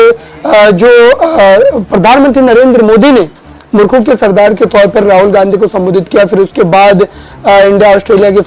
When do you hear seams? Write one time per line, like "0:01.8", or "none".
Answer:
none

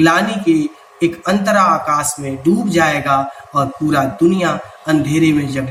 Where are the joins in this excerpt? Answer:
none

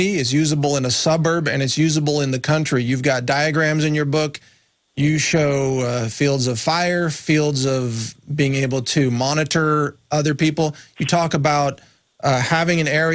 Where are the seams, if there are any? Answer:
0:09.8

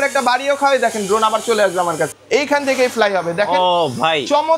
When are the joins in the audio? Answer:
0:02.2

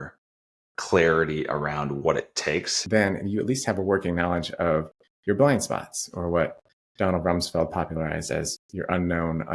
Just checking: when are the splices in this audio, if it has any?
0:02.8

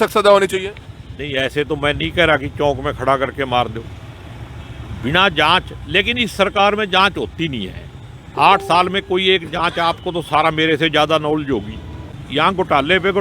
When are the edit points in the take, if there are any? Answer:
0:12.1

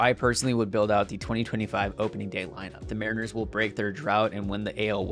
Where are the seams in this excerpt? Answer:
0:02.9

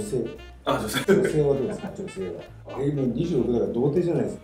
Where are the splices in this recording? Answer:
0:01.0
0:02.7

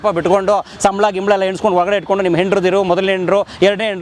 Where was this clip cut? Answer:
none

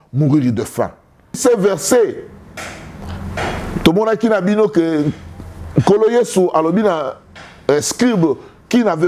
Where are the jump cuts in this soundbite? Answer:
0:01.4

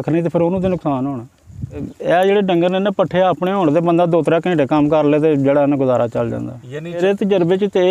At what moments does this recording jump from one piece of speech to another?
0:01.9
0:07.0

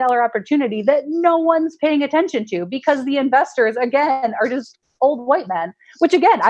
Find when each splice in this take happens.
none

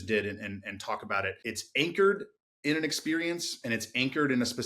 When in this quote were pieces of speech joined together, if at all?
0:01.4

